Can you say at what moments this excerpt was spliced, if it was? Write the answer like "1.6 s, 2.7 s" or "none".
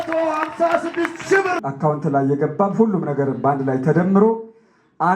1.6 s